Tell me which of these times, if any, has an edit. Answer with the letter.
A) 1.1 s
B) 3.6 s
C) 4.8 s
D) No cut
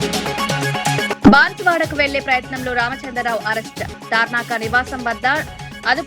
A